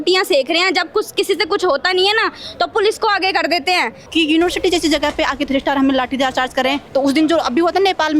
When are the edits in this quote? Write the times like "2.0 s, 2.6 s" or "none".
4.0 s, 6.8 s